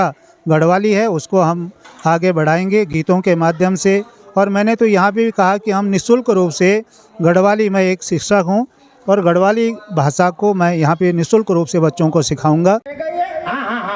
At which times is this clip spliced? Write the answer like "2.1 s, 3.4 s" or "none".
none